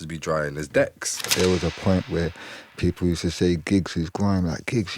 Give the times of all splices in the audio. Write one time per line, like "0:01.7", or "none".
0:01.2